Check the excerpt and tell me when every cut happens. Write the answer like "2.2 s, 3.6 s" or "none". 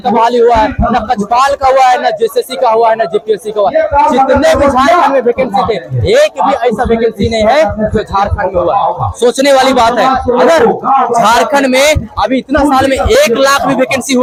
none